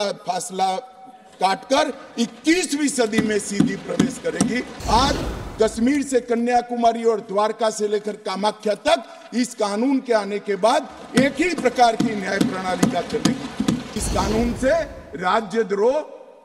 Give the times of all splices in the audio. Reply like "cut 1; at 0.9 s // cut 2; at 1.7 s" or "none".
cut 1; at 4.7 s // cut 2; at 13.9 s